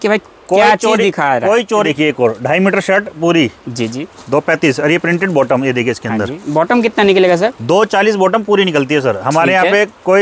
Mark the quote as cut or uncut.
cut